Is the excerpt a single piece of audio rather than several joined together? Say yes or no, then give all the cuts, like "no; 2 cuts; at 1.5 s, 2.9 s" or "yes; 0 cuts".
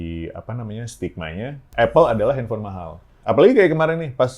no; 2 cuts; at 1.7 s, 3.1 s